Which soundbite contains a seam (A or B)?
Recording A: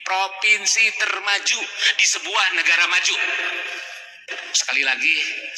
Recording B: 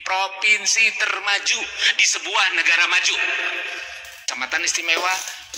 B